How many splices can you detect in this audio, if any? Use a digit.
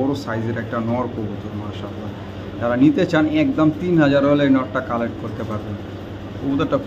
0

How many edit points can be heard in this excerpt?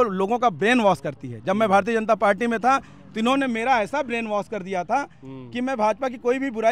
0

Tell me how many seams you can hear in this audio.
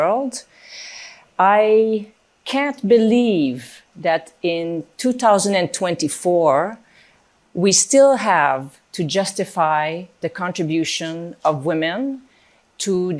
0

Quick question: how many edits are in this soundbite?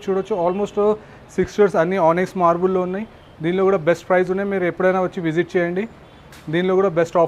0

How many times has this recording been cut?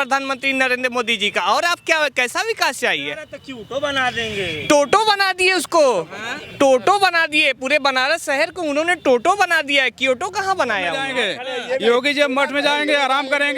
1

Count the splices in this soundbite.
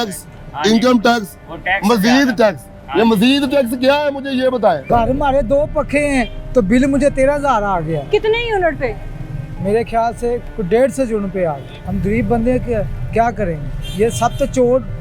0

